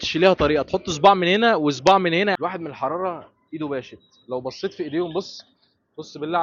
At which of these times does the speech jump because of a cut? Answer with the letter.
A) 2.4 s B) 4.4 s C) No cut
A